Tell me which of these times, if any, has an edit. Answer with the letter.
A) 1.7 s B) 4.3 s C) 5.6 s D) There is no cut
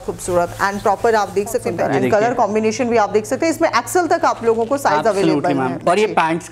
A